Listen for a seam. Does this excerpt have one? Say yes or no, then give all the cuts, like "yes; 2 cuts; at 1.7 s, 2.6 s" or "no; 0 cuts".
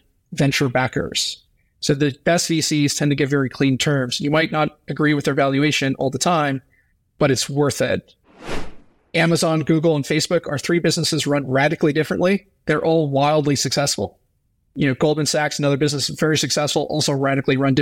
yes; 1 cut; at 8.6 s